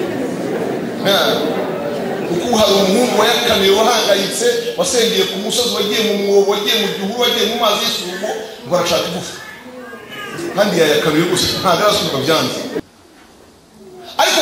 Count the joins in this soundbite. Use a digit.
1